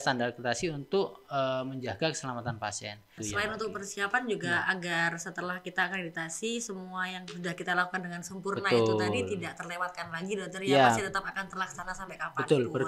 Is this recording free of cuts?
no; 1 cut; at 3.1 s

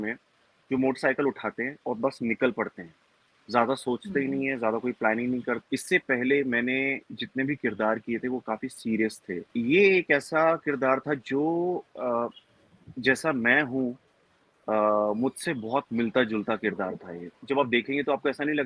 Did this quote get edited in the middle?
yes; 3 cuts; at 5.6 s, 9.5 s, 17.3 s

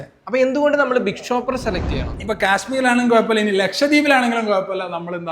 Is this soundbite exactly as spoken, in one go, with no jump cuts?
no; 1 cut; at 2.2 s

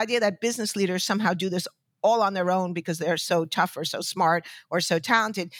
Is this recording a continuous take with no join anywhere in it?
yes; 0 cuts

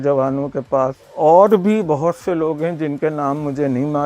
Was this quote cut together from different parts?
yes; 1 cut; at 1.0 s

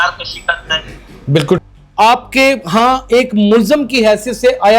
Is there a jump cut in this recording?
yes; 1 cut; at 1.6 s

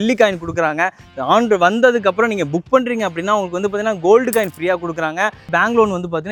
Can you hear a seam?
no; 0 cuts

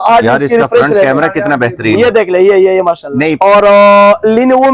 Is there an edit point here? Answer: yes; 1 cut; at 3.4 s

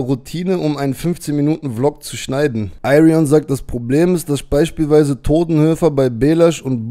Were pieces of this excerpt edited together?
yes; 1 cut; at 2.7 s

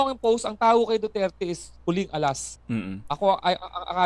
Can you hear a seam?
yes; 1 cut; at 2.5 s

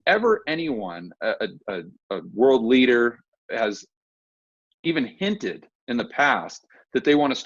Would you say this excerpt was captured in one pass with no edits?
yes; 0 cuts

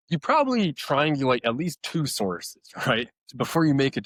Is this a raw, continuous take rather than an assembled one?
yes; 0 cuts

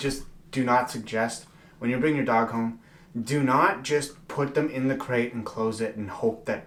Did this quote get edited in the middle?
no; 0 cuts

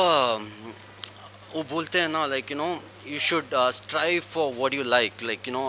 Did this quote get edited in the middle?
no; 0 cuts

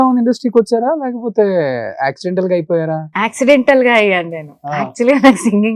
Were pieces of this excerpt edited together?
no; 0 cuts

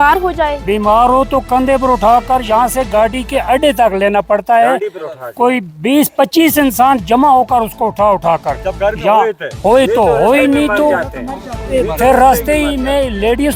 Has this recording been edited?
no; 0 cuts

